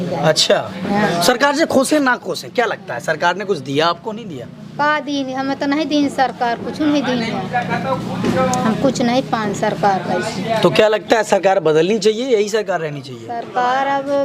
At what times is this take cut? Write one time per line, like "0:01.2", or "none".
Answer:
none